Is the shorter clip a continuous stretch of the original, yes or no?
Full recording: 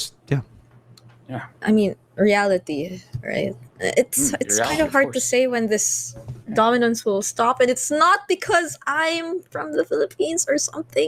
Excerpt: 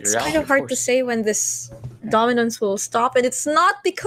yes